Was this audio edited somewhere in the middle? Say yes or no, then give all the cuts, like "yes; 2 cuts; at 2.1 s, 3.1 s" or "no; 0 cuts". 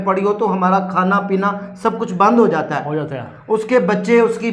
no; 0 cuts